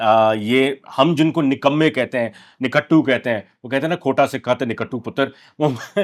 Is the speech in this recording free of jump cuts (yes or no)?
yes